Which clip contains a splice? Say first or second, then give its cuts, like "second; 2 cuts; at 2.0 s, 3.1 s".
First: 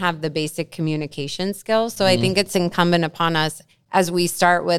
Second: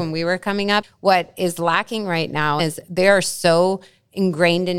second; 2 cuts; at 0.9 s, 2.6 s